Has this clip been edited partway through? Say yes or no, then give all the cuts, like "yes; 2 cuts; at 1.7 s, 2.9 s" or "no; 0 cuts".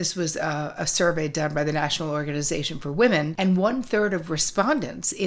yes; 1 cut; at 3.3 s